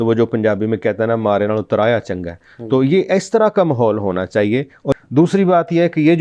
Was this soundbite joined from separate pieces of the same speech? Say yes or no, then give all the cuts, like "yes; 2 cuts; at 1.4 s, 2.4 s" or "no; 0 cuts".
yes; 1 cut; at 4.9 s